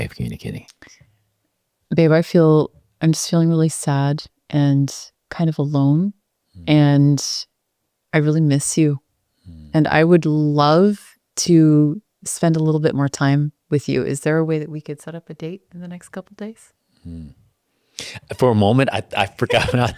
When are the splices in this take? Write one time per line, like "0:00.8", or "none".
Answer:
none